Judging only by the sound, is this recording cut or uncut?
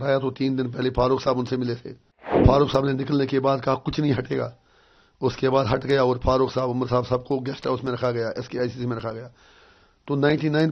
cut